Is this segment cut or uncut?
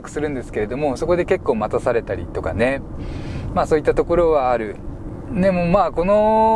uncut